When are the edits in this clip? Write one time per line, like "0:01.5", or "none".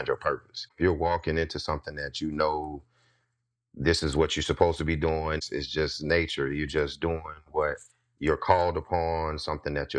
0:00.8
0:05.4